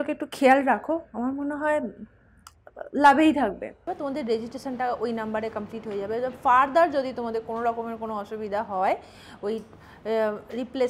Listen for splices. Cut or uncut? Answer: cut